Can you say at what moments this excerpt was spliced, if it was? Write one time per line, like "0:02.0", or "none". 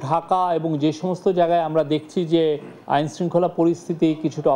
0:02.0